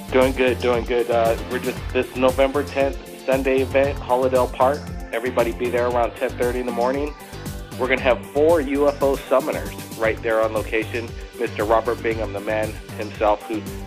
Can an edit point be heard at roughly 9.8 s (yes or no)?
no